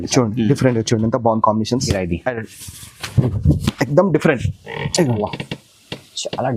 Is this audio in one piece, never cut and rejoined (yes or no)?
no